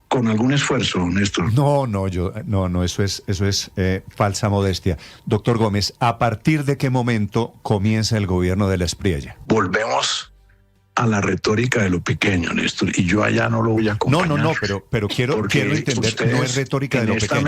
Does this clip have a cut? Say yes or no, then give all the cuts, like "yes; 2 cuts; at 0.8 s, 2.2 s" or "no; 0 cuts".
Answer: yes; 1 cut; at 9.3 s